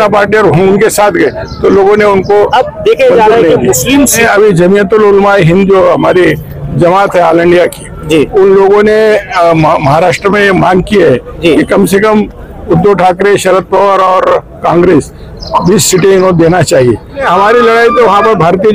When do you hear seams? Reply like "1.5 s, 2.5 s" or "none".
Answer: 4.2 s, 17.2 s